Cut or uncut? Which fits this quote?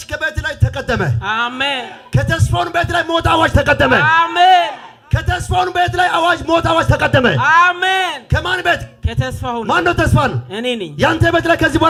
uncut